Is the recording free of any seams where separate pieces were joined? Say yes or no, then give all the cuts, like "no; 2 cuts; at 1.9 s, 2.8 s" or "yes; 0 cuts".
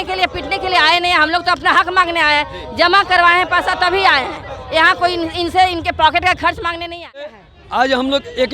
no; 1 cut; at 7.5 s